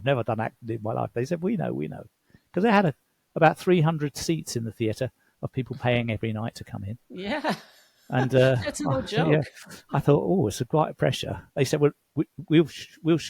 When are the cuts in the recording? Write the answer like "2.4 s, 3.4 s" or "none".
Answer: none